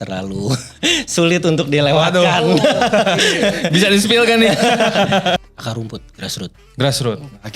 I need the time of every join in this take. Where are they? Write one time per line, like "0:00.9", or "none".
0:05.4